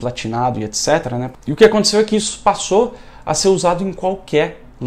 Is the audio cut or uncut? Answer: cut